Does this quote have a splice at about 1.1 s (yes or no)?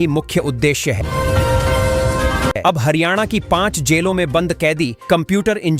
no